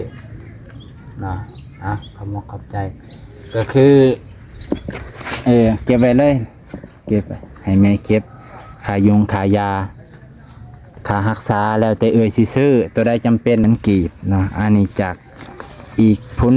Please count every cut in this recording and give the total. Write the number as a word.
one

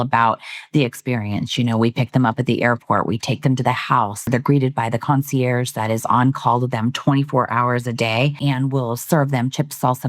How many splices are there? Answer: two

